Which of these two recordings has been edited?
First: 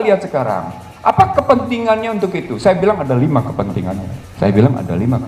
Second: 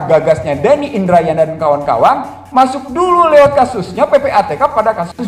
first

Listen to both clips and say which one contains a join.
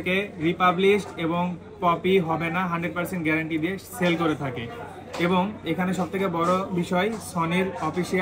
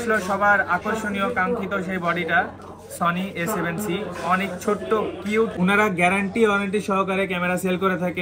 second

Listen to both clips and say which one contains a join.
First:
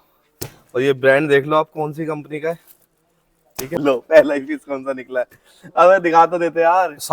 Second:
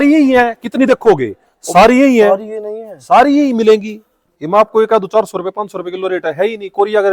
first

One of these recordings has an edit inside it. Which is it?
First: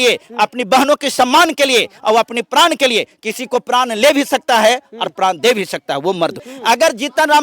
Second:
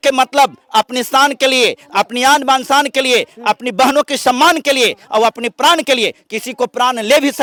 first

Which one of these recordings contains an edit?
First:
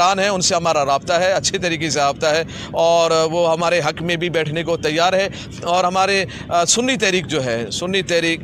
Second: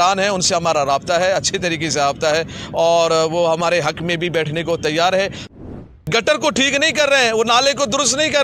second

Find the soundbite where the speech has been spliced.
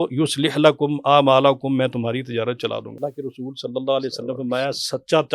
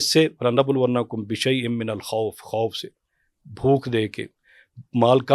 first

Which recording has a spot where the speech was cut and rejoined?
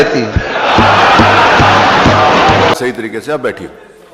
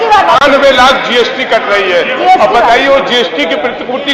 first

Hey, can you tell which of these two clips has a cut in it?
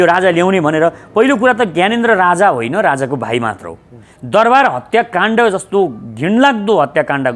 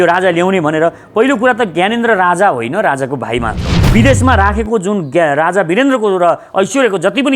second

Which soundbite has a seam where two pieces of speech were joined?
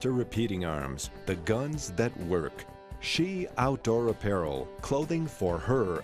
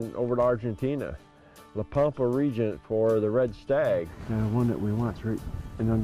second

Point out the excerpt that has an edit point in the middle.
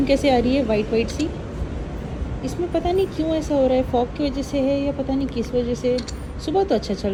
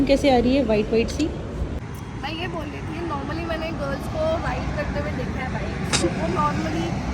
second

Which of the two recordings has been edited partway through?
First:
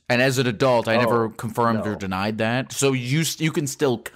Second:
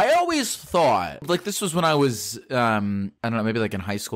second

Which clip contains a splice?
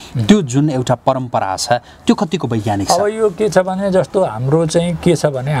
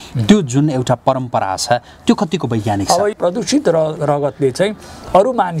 second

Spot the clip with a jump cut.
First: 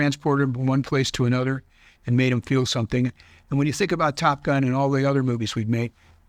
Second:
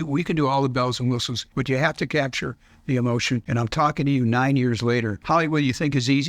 second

